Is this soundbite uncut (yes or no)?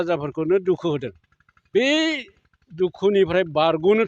no